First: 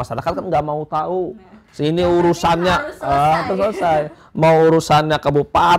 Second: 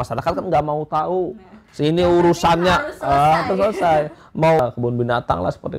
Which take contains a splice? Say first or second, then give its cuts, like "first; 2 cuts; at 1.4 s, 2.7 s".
second; 1 cut; at 4.6 s